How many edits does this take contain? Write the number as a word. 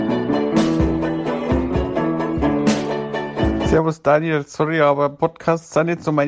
one